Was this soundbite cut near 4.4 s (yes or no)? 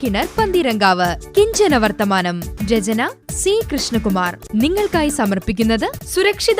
yes